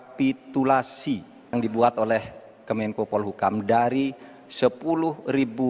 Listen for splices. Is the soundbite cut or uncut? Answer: cut